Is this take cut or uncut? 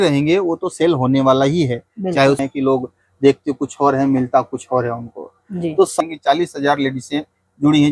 cut